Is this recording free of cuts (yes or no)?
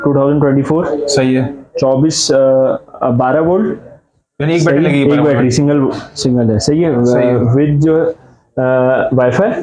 yes